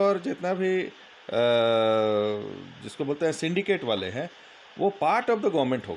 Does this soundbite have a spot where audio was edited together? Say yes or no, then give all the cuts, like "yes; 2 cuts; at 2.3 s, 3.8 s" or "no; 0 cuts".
no; 0 cuts